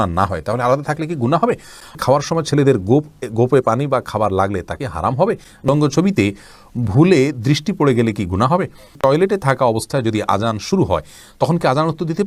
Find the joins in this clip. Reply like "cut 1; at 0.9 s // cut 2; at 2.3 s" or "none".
cut 1; at 1.9 s // cut 2; at 5.7 s // cut 3; at 8.9 s